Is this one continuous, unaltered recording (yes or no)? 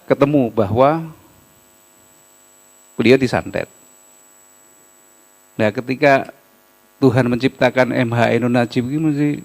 no